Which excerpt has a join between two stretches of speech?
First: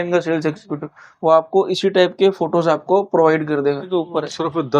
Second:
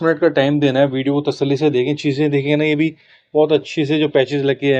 first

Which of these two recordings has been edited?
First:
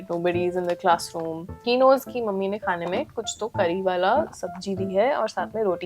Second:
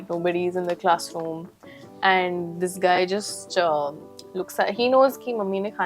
first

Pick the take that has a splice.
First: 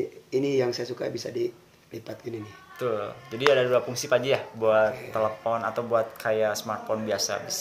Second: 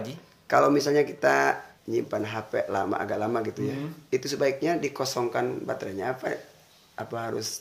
second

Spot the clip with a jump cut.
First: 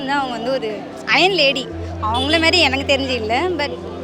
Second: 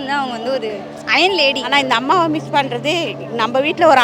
second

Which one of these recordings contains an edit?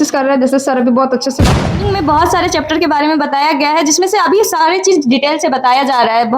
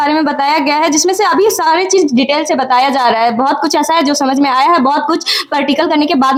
first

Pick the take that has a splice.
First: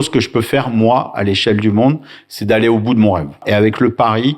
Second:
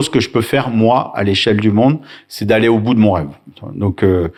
first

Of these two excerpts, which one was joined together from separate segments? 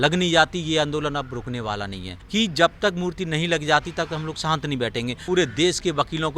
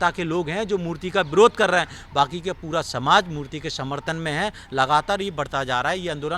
first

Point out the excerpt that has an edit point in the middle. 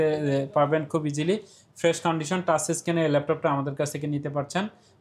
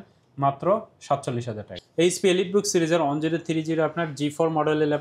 second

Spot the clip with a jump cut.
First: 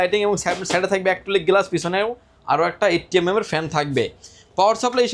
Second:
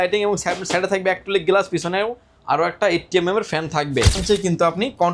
second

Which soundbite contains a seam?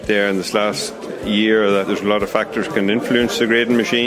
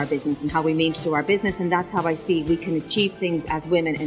first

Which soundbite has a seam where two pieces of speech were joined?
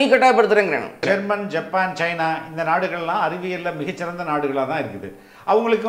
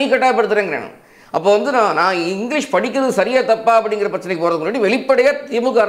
first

